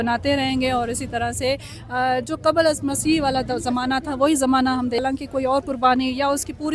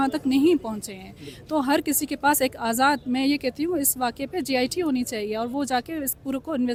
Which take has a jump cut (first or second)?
first